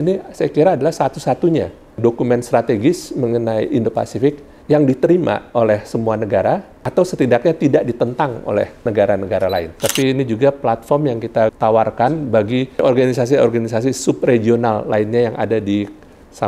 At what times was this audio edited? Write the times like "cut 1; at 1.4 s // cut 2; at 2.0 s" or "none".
cut 1; at 2.0 s // cut 2; at 4.5 s // cut 3; at 6.8 s // cut 4; at 8.8 s // cut 5; at 9.7 s // cut 6; at 11.5 s // cut 7; at 12.8 s